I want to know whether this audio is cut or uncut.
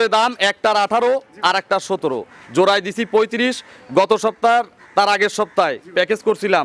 uncut